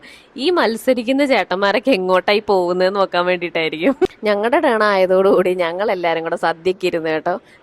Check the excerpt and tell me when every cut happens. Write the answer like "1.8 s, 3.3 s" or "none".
4.1 s